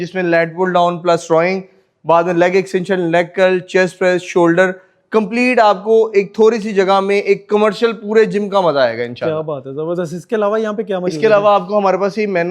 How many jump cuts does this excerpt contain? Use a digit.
0